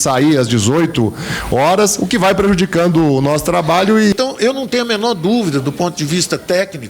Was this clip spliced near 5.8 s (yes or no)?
no